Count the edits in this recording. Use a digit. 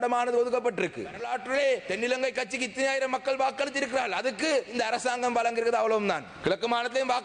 4